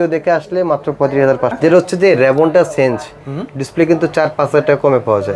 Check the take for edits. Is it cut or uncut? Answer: cut